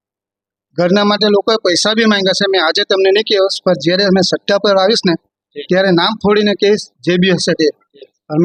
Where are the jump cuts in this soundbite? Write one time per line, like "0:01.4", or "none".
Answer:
none

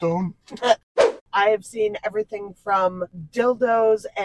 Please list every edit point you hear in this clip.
0:01.1
0:03.1

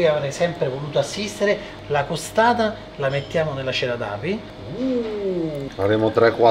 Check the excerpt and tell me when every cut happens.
0:01.7
0:04.6
0:05.6

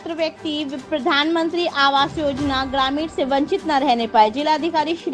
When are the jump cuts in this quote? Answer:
none

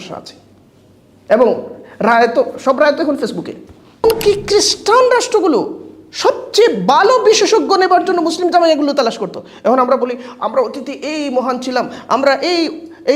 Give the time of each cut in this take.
0:04.0

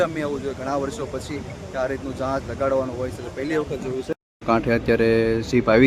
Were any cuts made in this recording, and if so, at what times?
0:04.3

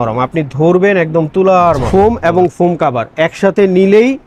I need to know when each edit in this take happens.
0:01.8

